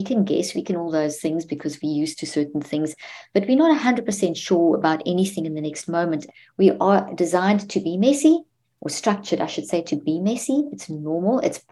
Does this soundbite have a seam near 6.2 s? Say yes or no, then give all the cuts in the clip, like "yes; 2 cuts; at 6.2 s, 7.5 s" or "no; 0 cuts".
yes; 1 cut; at 6.2 s